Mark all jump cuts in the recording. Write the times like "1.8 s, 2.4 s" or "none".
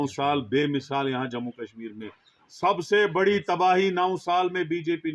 none